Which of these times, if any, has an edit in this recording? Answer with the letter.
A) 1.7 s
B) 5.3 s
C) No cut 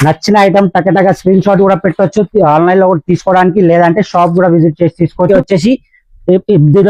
B